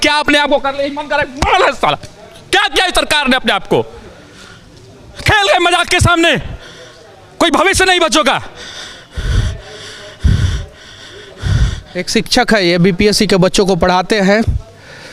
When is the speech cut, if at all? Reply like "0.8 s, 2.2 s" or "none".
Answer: none